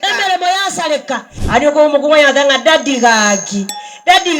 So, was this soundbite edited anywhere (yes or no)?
yes